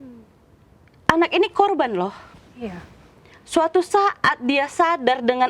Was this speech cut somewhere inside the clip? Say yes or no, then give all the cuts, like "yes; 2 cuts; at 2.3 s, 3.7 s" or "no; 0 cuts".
no; 0 cuts